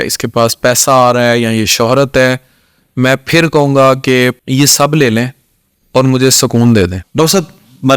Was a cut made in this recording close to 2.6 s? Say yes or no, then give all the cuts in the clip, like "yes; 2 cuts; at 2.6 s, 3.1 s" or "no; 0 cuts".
no; 2 cuts; at 4.4 s, 7.0 s